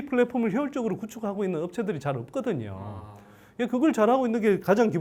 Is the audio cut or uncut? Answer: uncut